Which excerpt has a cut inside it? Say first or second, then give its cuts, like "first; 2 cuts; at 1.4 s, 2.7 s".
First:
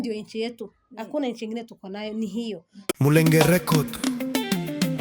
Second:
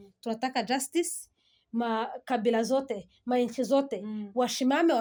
first; 1 cut; at 2.7 s